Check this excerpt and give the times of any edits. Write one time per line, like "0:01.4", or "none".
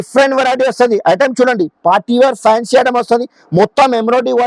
none